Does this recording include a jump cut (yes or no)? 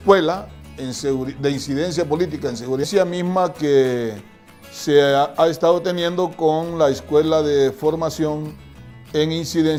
no